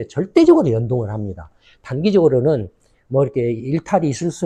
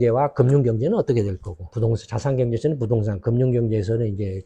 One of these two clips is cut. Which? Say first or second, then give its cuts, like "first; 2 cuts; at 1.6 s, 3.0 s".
second; 1 cut; at 1.7 s